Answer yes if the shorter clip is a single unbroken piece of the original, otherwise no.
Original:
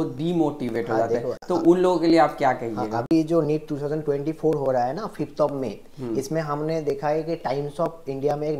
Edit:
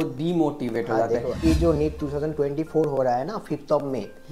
no